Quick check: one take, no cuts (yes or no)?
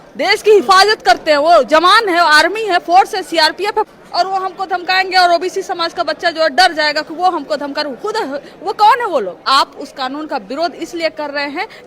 no